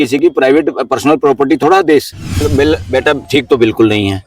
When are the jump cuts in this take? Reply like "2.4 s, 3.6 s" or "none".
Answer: 2.4 s